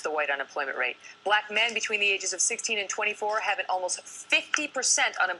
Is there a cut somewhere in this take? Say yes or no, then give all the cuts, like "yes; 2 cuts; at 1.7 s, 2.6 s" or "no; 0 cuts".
yes; 1 cut; at 1.1 s